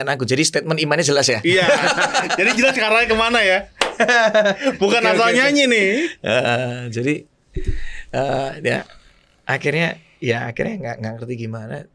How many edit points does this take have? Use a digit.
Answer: 0